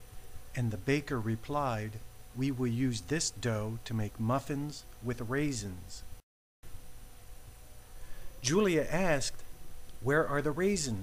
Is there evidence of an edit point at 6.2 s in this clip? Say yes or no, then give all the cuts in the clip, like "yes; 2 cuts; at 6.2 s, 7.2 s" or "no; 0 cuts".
yes; 1 cut; at 6.2 s